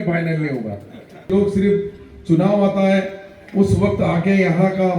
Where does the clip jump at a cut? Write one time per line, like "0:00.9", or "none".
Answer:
0:01.3